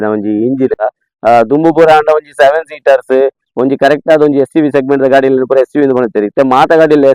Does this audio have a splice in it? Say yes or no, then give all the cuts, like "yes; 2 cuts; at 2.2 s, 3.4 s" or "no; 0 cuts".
yes; 1 cut; at 1.1 s